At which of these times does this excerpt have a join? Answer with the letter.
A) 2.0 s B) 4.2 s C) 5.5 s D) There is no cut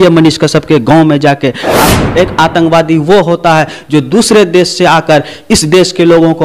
A